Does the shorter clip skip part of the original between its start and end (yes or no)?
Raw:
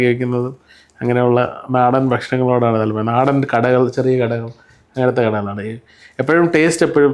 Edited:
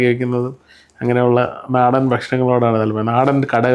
no